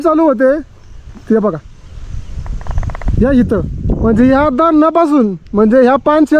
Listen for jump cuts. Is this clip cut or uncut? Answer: uncut